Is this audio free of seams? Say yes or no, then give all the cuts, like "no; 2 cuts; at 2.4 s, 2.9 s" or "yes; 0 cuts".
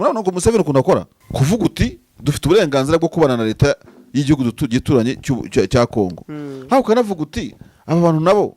no; 1 cut; at 1.2 s